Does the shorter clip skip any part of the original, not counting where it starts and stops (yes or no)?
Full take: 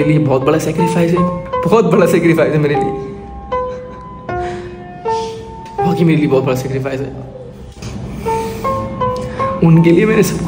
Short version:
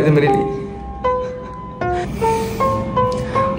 yes